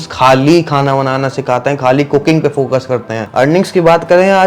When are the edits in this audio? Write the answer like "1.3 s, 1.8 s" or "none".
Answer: 3.2 s